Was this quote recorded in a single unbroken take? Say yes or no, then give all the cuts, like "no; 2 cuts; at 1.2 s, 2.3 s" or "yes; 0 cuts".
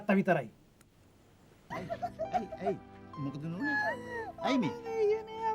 no; 1 cut; at 1.6 s